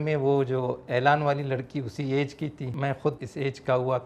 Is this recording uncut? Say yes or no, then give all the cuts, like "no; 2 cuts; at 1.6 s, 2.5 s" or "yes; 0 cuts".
no; 1 cut; at 3.0 s